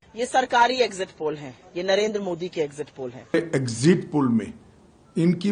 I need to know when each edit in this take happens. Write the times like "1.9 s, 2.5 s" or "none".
3.3 s